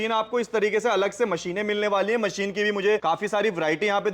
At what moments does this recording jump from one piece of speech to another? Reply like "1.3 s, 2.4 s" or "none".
3.0 s